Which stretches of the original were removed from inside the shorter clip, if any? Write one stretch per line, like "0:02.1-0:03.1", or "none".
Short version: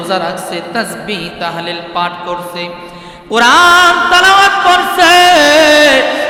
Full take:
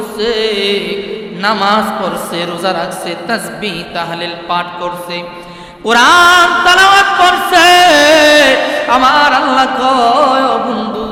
none

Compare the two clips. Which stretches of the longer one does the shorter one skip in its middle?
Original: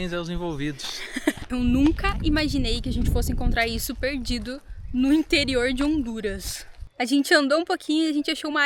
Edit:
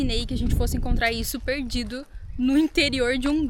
none

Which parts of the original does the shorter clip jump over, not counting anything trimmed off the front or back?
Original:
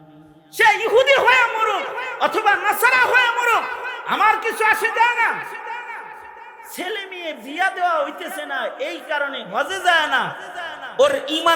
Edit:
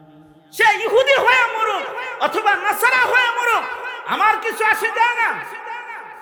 none

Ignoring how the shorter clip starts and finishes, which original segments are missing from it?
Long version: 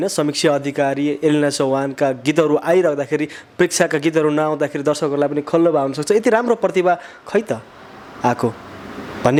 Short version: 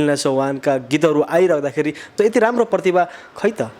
0:03.4-0:06.0

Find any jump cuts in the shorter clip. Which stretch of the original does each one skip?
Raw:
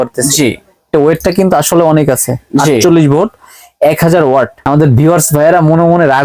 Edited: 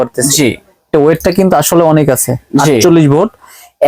none

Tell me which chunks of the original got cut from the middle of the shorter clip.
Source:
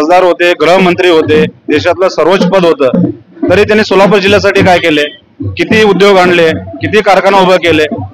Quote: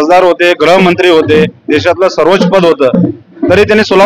none

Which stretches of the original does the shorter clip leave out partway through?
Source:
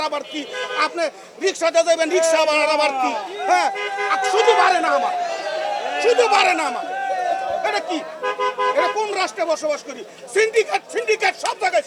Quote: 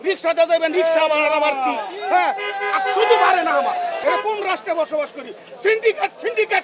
0:05.4-0:08.7

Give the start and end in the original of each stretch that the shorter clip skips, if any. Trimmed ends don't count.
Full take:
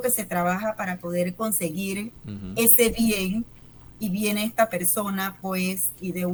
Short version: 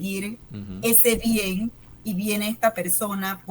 0:03.6-0:03.8

